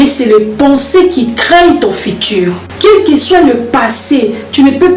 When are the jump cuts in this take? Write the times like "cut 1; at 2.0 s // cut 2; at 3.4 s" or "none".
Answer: none

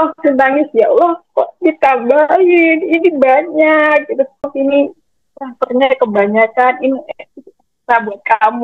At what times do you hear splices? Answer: cut 1; at 4.5 s

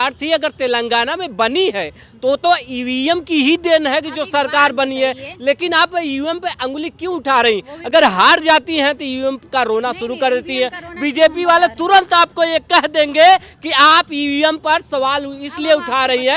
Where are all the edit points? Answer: none

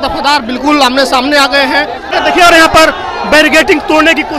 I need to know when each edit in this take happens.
cut 1; at 2.1 s

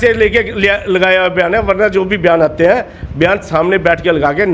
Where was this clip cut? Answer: none

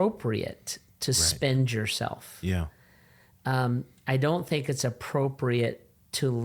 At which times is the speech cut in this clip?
none

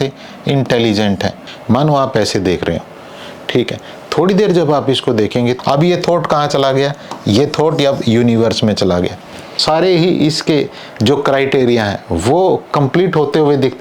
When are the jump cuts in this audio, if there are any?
cut 1; at 1.5 s // cut 2; at 5.6 s // cut 3; at 9.6 s

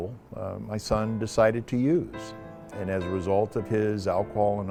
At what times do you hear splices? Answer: none

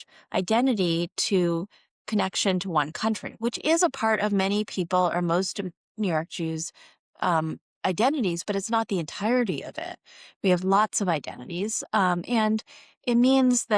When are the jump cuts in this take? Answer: none

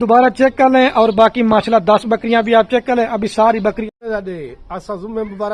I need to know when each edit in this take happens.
cut 1; at 3.8 s

